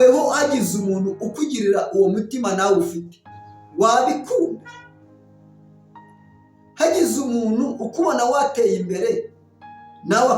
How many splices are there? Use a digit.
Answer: 2